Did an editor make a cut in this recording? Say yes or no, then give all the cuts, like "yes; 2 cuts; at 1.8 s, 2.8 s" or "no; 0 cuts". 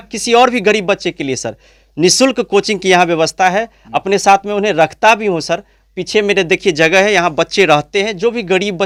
no; 0 cuts